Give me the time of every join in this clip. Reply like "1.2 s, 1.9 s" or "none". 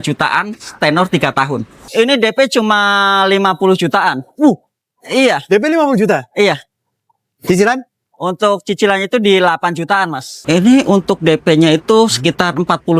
1.8 s, 10.4 s